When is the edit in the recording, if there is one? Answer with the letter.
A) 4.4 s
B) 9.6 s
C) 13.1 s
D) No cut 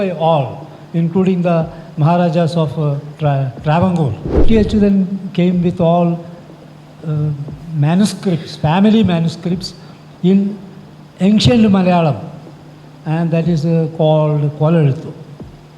A